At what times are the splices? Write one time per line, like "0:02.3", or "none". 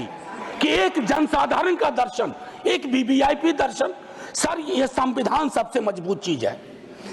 none